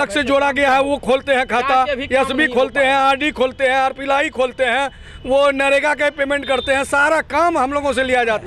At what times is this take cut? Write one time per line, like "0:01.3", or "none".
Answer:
none